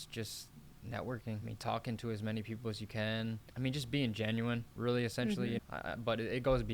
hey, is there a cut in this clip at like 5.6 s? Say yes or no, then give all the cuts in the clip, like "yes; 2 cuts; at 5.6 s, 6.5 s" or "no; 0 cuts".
yes; 3 cuts; at 1.5 s, 3.5 s, 5.6 s